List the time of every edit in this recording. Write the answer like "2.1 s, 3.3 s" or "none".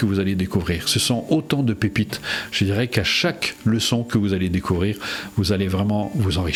none